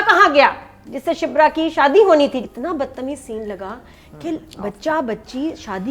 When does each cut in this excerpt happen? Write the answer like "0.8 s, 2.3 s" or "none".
2.5 s